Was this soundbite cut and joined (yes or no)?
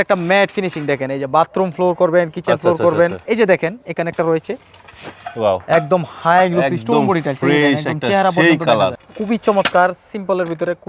yes